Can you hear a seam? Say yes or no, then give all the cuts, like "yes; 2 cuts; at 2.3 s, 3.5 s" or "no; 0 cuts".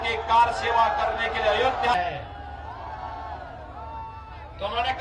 yes; 1 cut; at 1.9 s